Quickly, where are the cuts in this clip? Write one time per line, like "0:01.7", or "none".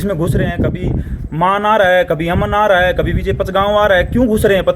none